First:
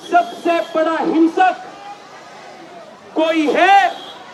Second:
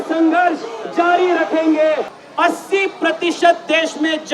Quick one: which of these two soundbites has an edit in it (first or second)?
second